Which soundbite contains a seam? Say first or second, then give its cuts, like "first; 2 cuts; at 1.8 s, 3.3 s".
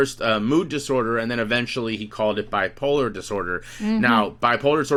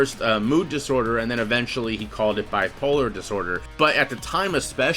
second; 1 cut; at 3.7 s